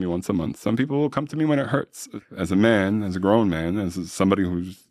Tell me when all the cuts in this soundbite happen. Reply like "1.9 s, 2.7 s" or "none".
2.1 s